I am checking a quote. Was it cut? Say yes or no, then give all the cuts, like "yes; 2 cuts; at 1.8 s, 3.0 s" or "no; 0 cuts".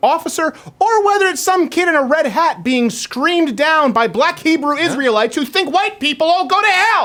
no; 0 cuts